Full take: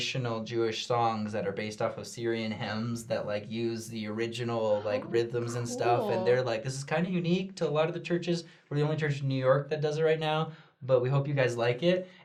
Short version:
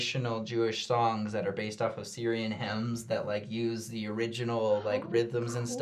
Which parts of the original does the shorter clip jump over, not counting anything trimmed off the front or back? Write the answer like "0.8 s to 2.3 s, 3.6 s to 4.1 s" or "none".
none